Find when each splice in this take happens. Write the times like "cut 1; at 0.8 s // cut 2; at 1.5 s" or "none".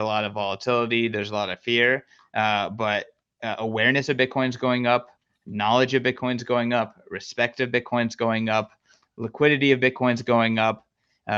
none